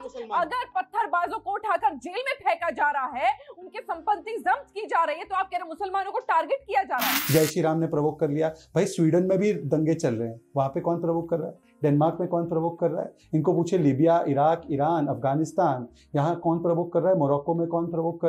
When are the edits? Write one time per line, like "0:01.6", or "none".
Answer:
0:07.2